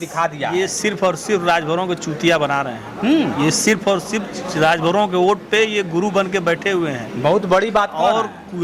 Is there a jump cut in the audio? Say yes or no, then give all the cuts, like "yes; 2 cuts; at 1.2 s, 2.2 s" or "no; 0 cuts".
no; 0 cuts